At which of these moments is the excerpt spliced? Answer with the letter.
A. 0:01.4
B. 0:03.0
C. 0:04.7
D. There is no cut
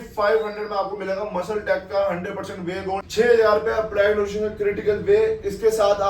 B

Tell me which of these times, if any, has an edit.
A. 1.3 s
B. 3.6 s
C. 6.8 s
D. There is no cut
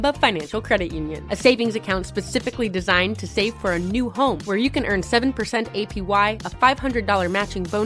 D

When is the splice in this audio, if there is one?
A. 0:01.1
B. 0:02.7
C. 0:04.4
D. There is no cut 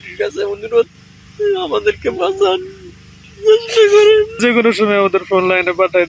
C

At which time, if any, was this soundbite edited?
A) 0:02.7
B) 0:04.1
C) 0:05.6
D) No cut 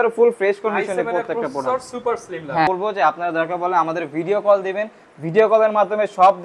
A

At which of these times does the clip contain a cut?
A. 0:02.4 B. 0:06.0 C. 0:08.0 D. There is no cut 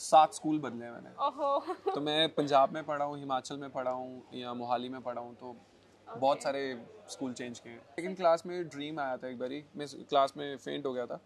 C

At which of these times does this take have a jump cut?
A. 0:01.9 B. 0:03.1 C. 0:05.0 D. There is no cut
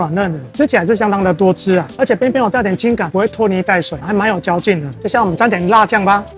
D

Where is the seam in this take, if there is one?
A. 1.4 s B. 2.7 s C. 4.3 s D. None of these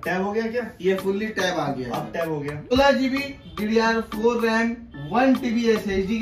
B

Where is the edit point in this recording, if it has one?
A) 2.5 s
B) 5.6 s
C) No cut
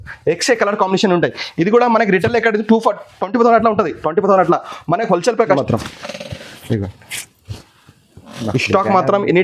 B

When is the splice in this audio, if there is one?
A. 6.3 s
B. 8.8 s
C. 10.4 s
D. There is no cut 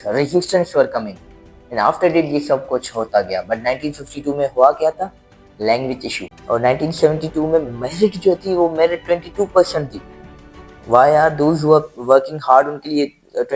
A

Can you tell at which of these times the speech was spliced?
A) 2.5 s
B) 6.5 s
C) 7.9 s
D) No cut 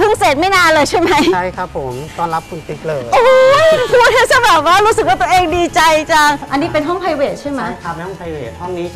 B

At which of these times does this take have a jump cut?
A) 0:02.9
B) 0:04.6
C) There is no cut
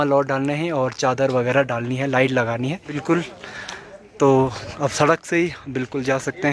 A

